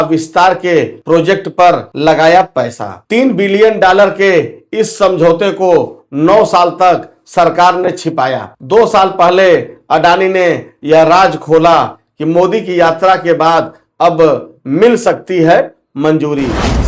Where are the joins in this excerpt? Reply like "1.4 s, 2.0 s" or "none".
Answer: 1.0 s, 1.9 s